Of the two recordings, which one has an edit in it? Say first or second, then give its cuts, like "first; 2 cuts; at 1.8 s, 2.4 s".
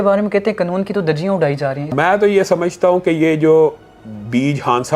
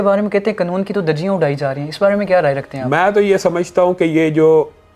first; 1 cut; at 1.8 s